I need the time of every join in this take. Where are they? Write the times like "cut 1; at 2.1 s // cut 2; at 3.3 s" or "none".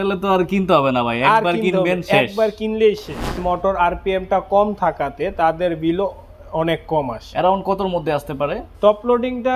cut 1; at 3.4 s // cut 2; at 8.7 s